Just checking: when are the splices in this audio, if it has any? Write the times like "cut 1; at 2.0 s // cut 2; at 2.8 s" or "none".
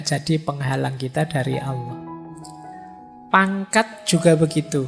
cut 1; at 1.8 s // cut 2; at 3.2 s